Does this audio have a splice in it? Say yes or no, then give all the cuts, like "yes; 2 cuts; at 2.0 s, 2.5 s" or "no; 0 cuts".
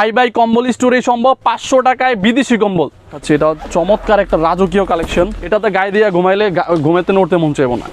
yes; 2 cuts; at 3.2 s, 5.4 s